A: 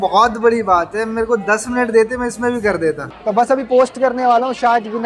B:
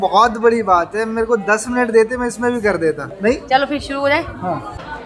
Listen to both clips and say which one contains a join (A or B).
A